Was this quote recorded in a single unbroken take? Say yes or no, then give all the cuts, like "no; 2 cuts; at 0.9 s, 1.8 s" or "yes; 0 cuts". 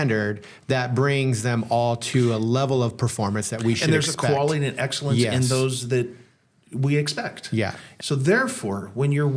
no; 1 cut; at 7.9 s